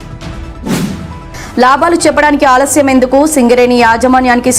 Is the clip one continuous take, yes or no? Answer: no